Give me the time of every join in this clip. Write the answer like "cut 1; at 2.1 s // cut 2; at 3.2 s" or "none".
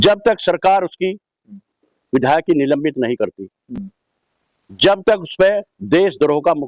none